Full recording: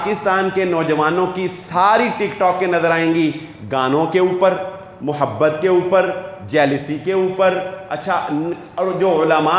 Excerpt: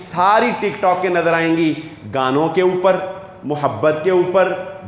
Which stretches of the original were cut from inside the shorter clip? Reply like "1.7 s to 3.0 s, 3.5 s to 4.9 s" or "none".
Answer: none